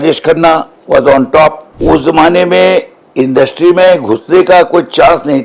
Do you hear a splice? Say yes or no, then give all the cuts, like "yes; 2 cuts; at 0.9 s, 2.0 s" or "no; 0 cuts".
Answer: yes; 1 cut; at 1.7 s